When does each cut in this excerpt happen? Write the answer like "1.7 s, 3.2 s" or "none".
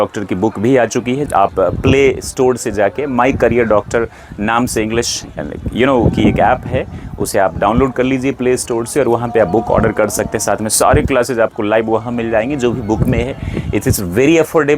1.2 s